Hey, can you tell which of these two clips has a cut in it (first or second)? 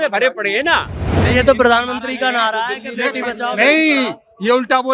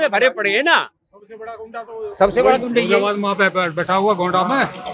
first